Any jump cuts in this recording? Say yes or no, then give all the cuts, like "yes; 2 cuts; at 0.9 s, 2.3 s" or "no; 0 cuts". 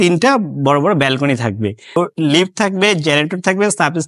yes; 1 cut; at 2.0 s